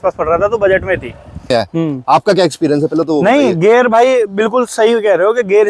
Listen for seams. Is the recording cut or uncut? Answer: cut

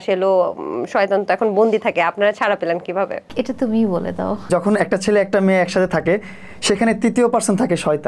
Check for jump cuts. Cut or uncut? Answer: cut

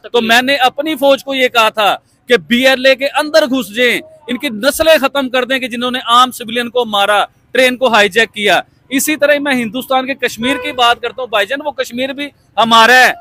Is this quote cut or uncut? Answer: uncut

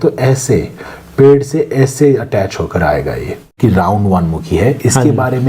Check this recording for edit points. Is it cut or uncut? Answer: cut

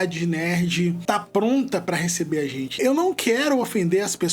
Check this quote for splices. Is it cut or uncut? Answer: cut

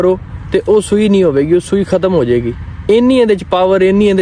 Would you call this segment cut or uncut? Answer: cut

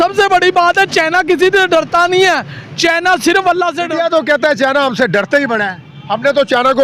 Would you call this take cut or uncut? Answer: cut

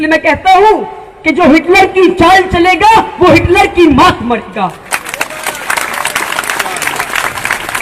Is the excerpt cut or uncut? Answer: uncut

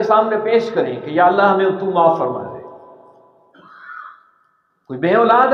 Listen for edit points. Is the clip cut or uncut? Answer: uncut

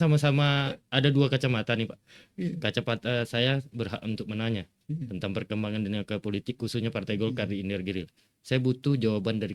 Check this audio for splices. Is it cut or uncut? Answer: uncut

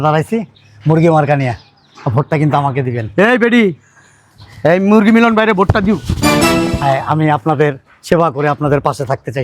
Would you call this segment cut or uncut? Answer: uncut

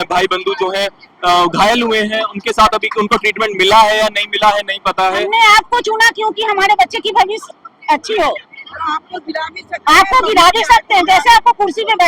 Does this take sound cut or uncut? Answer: cut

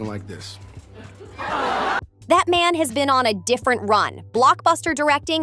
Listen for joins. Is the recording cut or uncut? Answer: uncut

